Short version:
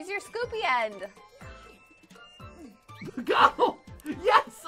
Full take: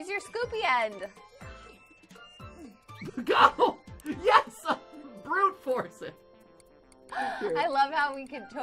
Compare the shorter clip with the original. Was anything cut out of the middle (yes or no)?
no